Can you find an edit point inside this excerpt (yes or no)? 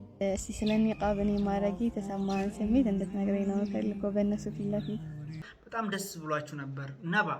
yes